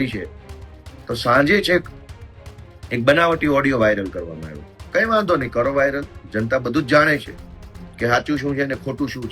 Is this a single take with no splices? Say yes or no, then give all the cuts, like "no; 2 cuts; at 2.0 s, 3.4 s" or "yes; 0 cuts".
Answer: yes; 0 cuts